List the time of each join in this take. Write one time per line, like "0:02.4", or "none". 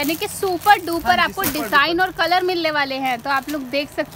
none